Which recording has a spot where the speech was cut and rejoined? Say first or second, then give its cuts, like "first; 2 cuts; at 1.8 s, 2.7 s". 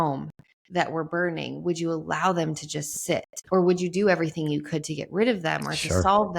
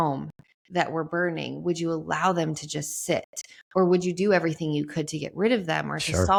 first; 1 cut; at 3.3 s